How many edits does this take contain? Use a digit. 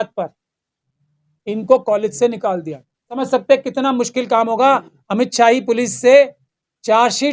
1